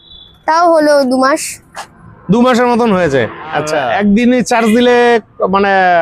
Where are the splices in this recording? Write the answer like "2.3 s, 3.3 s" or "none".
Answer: 3.8 s